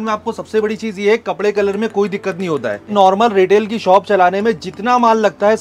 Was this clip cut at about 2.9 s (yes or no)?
yes